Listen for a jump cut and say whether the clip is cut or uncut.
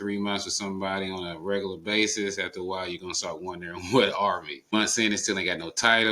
cut